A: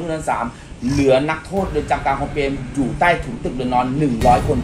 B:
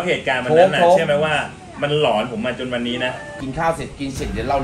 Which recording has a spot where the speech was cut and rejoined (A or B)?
B